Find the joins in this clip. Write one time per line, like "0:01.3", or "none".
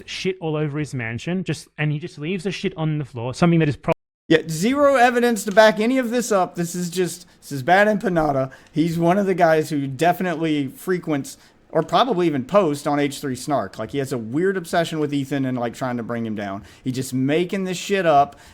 none